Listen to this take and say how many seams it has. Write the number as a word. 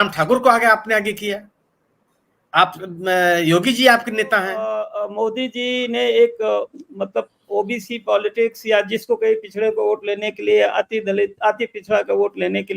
one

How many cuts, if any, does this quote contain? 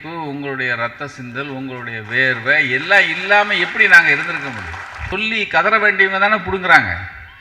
one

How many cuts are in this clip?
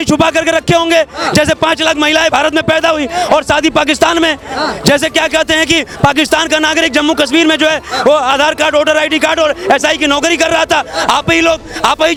zero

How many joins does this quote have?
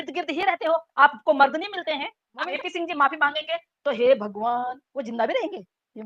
one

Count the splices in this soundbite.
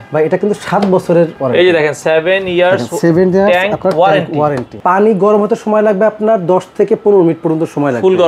two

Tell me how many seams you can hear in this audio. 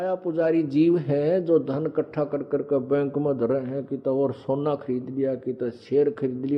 zero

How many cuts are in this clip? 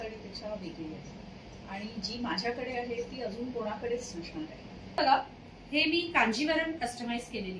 one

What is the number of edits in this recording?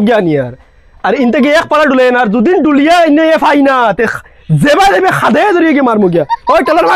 zero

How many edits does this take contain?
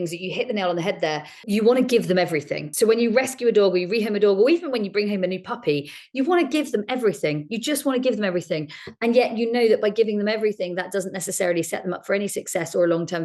two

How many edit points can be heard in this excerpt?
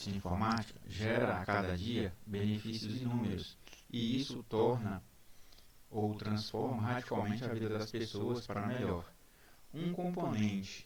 zero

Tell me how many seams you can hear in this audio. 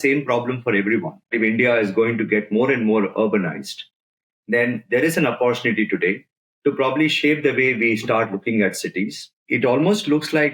two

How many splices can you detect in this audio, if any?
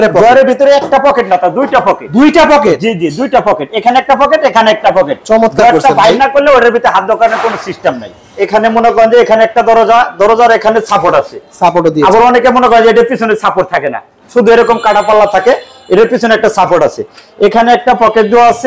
zero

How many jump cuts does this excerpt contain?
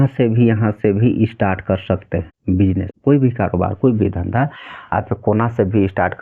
one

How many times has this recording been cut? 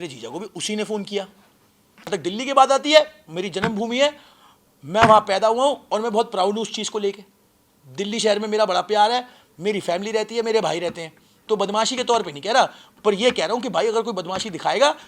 one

